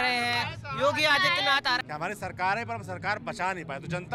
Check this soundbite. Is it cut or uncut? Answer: cut